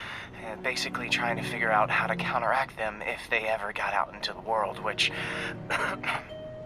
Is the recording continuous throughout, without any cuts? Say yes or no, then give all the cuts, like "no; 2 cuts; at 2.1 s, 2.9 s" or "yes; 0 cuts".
yes; 0 cuts